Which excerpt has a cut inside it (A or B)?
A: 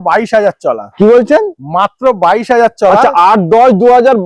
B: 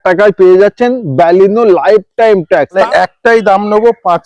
B